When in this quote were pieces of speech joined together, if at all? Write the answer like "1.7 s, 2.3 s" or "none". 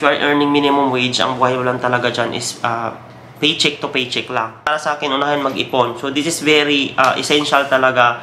4.7 s